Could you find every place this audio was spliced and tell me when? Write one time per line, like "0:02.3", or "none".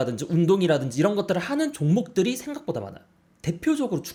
none